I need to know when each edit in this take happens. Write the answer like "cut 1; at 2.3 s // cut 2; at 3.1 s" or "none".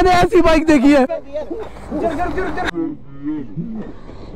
cut 1; at 1.1 s